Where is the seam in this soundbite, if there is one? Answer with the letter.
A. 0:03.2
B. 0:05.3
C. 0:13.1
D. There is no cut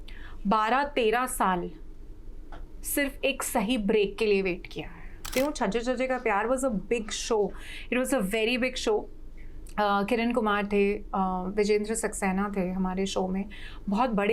B